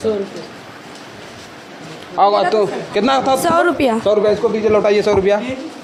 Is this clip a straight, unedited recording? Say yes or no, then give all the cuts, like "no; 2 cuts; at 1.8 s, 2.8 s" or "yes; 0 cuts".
yes; 0 cuts